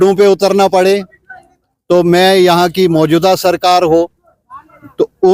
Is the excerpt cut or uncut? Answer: uncut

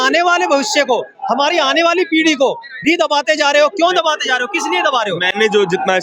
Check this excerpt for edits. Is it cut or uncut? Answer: uncut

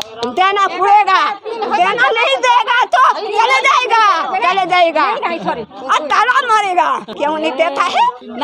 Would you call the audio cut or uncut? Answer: cut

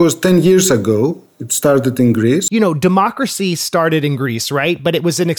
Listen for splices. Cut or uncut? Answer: cut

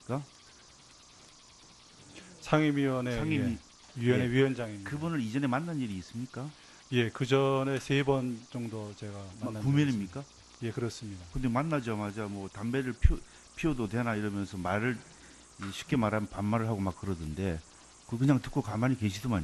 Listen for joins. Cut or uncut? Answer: cut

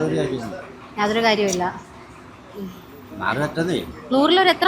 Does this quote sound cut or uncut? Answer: uncut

